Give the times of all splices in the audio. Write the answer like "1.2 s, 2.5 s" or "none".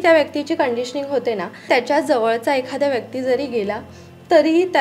1.7 s